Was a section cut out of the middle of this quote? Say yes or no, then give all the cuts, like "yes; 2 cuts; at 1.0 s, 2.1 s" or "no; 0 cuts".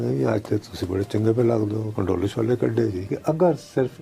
yes; 2 cuts; at 1.9 s, 3.0 s